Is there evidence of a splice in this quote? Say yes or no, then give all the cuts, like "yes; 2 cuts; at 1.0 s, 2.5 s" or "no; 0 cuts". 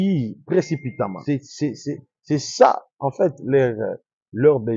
yes; 1 cut; at 1.2 s